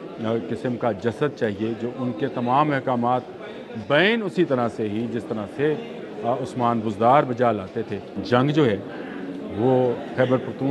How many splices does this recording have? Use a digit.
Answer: 1